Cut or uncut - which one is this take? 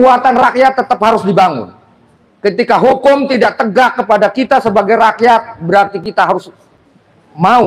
uncut